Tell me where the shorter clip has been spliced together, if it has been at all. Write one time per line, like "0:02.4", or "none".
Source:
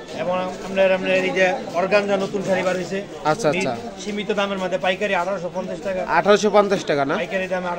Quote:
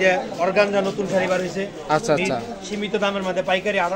none